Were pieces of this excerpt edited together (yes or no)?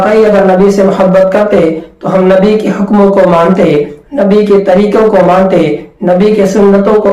no